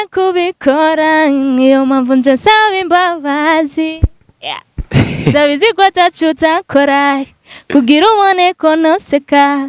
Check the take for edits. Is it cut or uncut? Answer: uncut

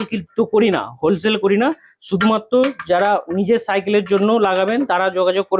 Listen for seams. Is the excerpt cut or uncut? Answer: uncut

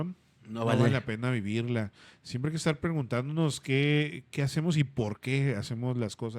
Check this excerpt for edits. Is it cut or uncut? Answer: uncut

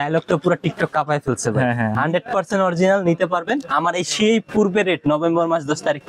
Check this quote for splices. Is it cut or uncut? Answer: cut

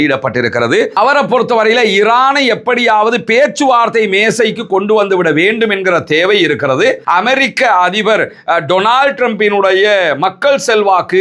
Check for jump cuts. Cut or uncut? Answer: cut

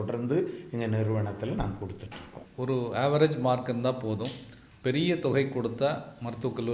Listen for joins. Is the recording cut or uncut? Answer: uncut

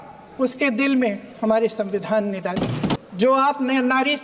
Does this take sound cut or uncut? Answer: cut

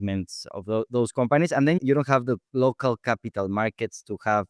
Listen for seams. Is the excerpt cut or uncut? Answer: cut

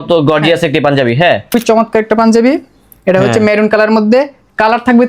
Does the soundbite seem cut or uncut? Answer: cut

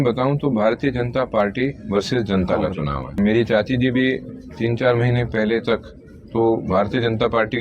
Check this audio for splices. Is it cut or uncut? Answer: cut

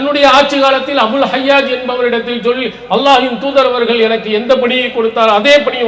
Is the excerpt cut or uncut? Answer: uncut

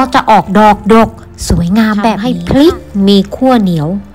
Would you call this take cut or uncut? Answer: cut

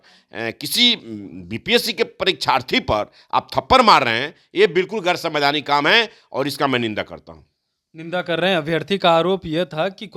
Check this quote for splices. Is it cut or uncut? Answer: uncut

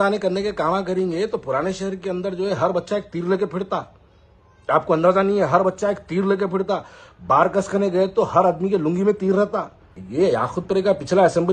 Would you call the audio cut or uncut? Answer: cut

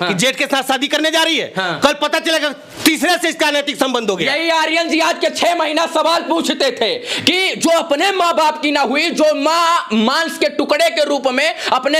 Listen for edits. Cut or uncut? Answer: uncut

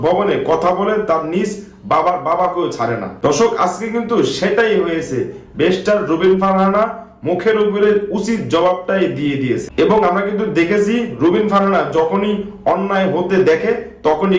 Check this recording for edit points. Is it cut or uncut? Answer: cut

